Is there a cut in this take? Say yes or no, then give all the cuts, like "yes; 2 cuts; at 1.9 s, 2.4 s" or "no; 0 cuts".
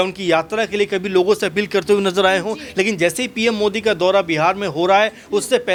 no; 0 cuts